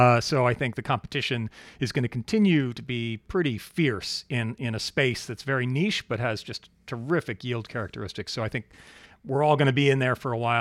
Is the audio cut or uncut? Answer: uncut